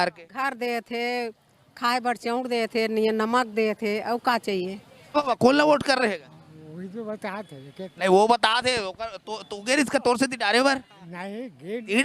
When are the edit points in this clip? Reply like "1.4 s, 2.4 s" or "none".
5.2 s